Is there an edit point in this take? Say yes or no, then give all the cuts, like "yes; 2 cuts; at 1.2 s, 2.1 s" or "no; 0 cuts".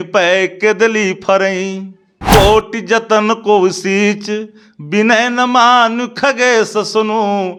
no; 0 cuts